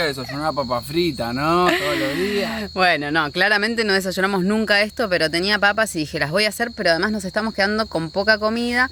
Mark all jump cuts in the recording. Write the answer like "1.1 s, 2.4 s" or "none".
none